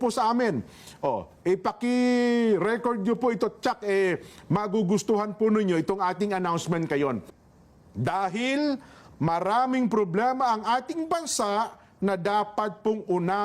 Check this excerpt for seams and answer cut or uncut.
cut